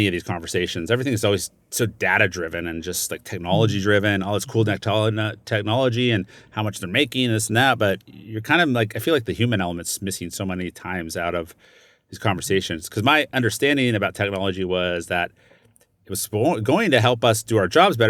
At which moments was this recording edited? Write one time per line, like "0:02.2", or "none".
none